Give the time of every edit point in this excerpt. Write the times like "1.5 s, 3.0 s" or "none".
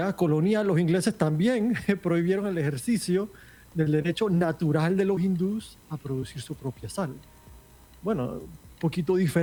none